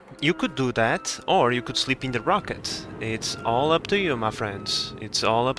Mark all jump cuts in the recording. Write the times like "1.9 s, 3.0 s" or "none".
none